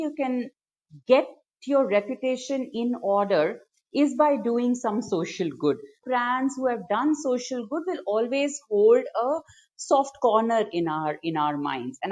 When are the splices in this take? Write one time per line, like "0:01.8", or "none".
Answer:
0:06.0